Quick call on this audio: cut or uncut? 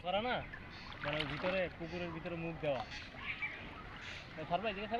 uncut